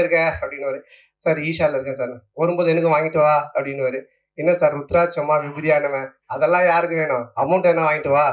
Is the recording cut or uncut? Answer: uncut